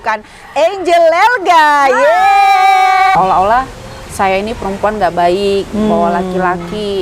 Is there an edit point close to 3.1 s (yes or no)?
yes